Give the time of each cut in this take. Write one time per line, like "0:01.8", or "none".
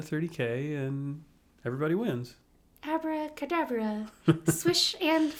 none